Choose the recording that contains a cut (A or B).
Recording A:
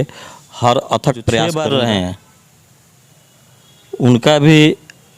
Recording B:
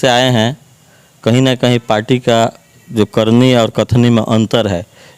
A